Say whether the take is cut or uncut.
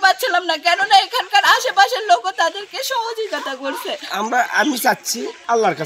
cut